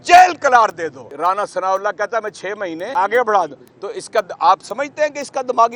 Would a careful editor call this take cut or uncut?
cut